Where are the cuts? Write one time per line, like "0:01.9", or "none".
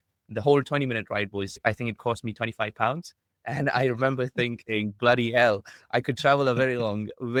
none